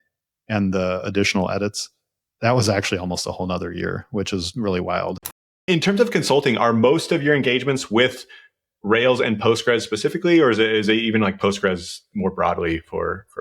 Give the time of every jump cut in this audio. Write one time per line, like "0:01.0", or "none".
0:05.2